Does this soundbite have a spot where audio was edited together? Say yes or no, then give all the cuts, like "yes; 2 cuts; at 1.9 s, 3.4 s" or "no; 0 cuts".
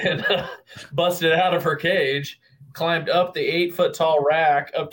no; 0 cuts